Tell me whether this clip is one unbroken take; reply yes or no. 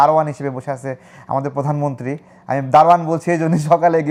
yes